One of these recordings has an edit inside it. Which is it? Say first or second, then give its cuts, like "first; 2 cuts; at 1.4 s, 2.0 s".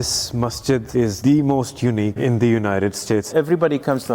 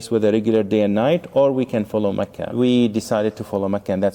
first; 3 cuts; at 0.9 s, 2.2 s, 3.3 s